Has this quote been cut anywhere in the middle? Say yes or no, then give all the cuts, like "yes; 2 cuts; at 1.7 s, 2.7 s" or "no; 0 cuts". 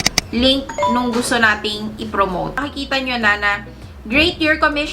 yes; 1 cut; at 2.6 s